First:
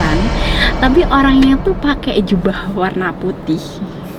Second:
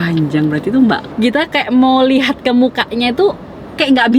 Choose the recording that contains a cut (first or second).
second